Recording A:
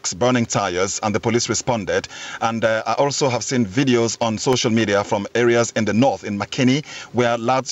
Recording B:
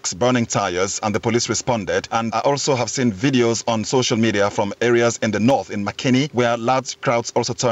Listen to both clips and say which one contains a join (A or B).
B